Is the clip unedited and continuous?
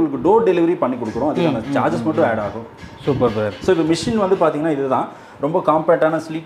yes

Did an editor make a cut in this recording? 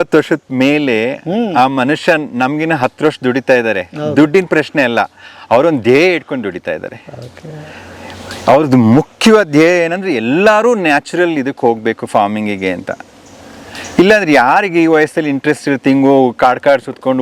no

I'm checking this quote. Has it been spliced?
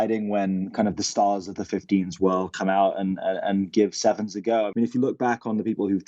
yes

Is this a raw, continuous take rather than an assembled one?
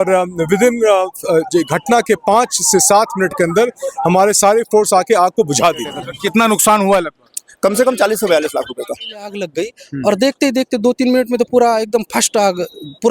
no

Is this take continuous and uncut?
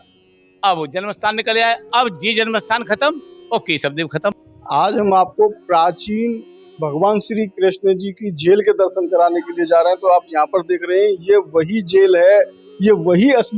no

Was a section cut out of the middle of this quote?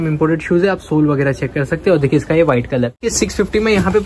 yes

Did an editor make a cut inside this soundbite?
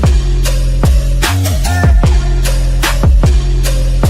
yes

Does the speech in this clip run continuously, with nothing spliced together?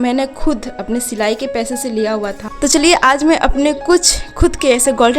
no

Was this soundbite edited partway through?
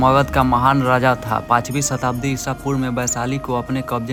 no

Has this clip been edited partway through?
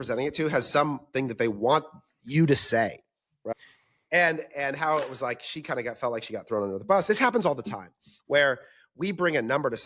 yes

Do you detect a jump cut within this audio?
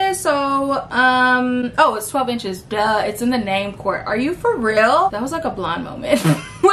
no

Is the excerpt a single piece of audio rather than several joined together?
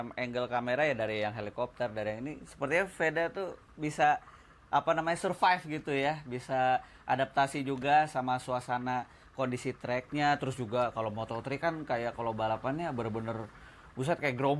yes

